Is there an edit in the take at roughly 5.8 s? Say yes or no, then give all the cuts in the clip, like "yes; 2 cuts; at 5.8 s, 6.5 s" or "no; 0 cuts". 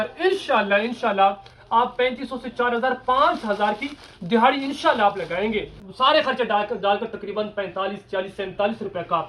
yes; 1 cut; at 5.8 s